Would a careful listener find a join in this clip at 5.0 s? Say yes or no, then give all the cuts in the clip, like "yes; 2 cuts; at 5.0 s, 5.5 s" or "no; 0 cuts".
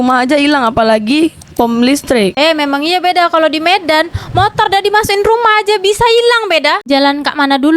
no; 1 cut; at 6.8 s